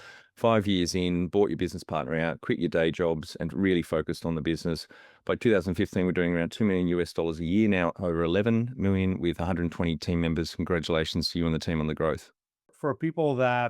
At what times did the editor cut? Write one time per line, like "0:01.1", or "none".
0:12.7